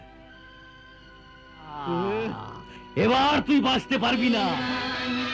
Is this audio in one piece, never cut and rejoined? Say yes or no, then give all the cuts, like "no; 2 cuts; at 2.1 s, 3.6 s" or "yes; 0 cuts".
yes; 0 cuts